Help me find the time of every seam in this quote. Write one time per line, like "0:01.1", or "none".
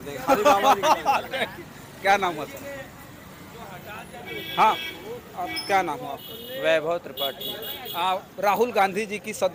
none

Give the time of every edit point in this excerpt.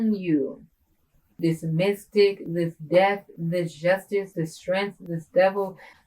0:01.3

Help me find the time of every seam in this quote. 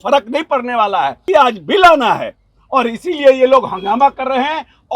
0:01.2

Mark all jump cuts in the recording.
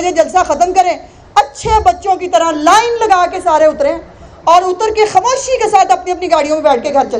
none

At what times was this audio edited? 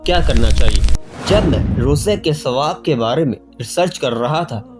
0:01.2

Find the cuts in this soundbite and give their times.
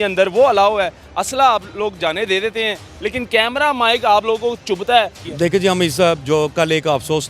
0:05.2

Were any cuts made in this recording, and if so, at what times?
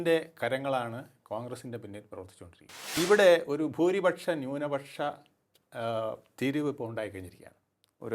0:02.8

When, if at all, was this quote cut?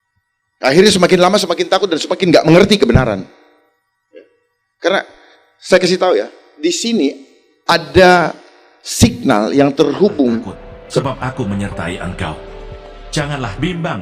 0:11.0

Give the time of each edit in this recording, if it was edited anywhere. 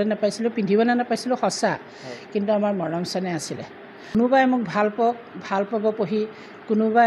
0:04.1

